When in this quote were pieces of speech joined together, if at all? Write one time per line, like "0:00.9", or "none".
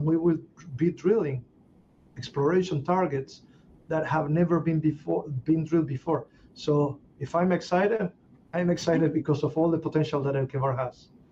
none